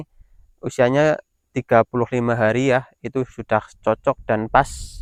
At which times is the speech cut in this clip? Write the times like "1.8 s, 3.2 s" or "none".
none